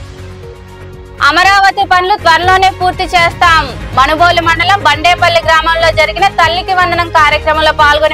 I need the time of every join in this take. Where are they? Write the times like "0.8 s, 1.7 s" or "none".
1.2 s